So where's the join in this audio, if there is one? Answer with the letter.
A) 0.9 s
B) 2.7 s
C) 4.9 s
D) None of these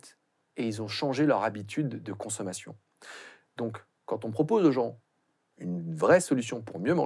D